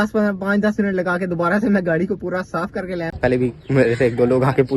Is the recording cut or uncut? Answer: cut